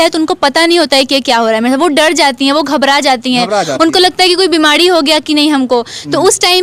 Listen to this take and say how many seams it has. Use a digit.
0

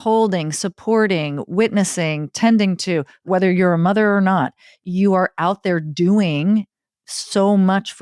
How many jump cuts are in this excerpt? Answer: 1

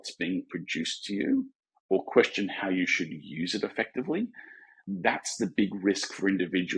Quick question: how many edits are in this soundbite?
1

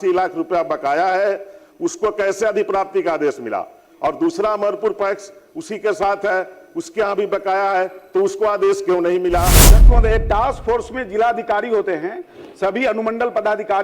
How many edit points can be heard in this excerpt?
1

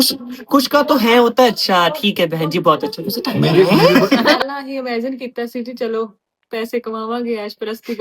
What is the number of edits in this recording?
1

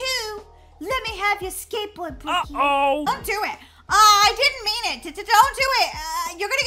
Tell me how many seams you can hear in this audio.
1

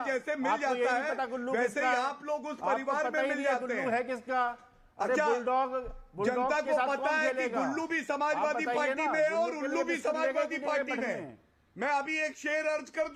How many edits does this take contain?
0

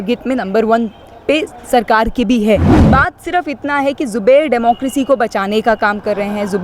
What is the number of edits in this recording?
1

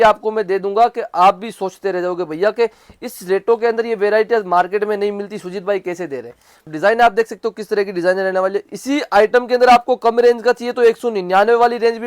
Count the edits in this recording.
1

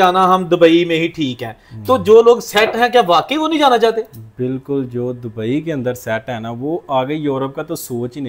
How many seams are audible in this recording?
0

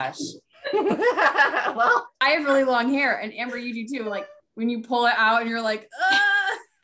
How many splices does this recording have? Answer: 1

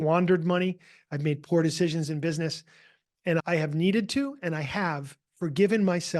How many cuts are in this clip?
1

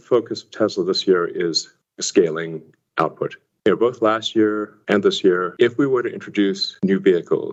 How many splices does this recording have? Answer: 0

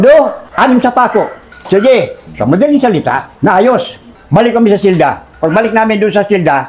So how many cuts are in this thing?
0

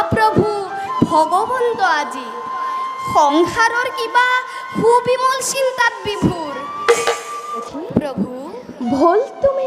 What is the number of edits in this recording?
1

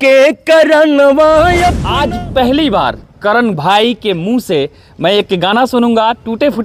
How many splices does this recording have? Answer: 1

